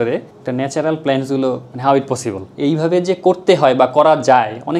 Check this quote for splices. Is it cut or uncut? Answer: uncut